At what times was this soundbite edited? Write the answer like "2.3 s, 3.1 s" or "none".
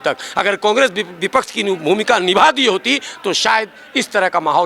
none